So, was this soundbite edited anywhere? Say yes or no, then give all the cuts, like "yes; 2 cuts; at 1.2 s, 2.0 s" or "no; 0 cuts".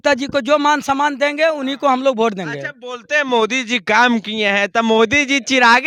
no; 0 cuts